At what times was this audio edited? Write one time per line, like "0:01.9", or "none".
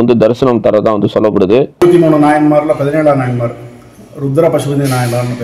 0:01.8